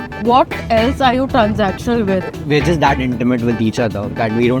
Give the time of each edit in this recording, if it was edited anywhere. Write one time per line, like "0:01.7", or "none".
0:02.3